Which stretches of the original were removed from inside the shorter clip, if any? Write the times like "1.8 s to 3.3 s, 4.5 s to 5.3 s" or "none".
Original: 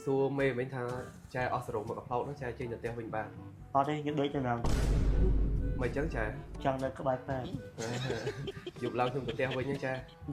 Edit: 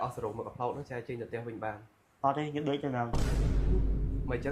none